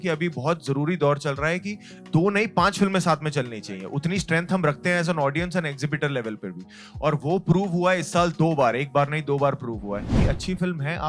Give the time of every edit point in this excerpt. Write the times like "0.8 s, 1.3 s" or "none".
10.1 s